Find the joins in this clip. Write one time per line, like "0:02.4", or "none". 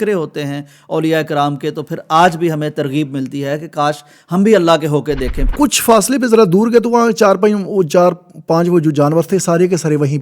0:05.4

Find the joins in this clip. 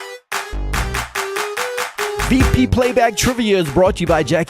0:02.3

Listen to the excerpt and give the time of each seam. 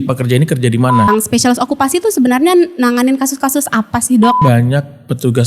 0:01.1
0:04.4

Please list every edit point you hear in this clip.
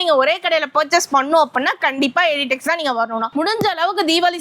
0:03.3

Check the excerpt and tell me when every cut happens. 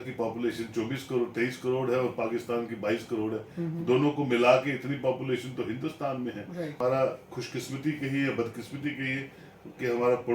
0:06.8

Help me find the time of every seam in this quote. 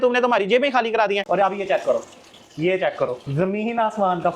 0:01.3

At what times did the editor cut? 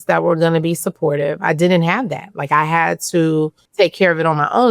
0:03.6

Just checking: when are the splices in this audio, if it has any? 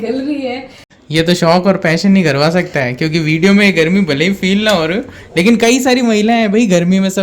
0:01.0

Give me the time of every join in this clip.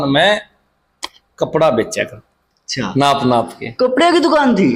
none

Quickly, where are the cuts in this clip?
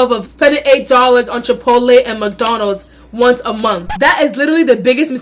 0:04.0

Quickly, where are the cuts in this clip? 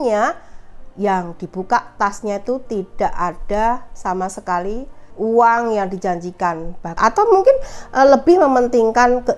0:05.0
0:06.9

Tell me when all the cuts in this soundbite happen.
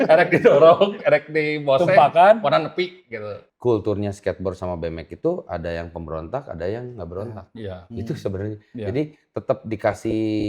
0:03.4

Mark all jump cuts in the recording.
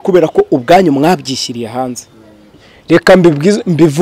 0:02.6

